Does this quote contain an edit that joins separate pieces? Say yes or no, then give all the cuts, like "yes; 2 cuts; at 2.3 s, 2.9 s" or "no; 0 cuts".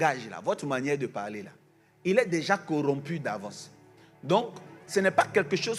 no; 0 cuts